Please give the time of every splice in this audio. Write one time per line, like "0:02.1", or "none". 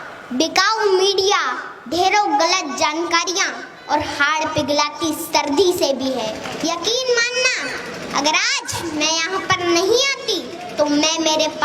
0:06.5